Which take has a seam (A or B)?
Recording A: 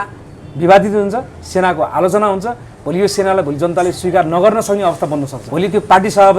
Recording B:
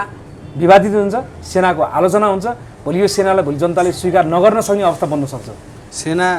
A